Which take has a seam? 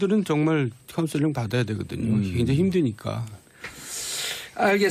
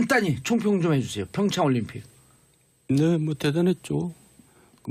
second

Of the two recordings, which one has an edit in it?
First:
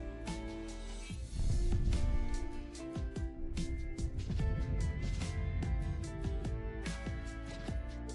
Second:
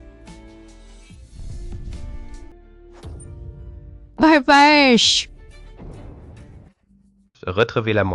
second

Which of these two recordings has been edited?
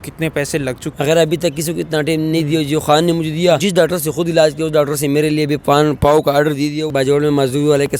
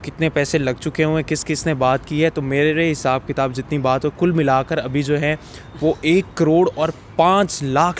first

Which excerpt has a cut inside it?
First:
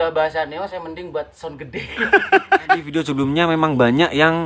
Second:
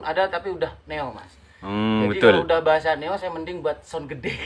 first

